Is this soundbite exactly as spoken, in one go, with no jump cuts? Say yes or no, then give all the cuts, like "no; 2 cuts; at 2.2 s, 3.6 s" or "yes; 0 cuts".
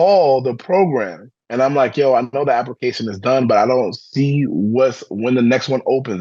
yes; 0 cuts